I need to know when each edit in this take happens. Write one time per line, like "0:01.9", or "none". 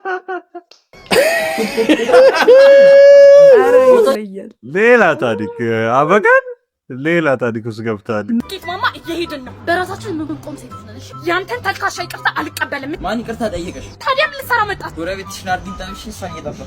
0:08.4

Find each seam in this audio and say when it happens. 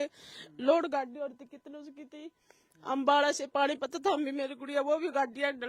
none

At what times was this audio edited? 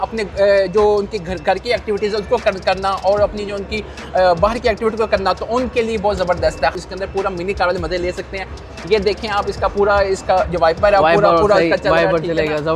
0:06.7

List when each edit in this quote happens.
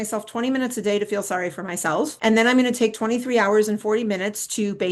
0:02.1

